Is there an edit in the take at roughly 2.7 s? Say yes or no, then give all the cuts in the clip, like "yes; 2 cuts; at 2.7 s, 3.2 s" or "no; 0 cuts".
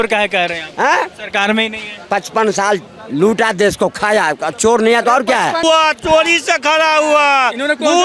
no; 1 cut; at 5.6 s